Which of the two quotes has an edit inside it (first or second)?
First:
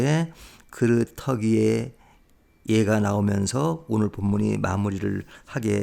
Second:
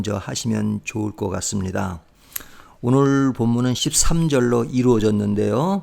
second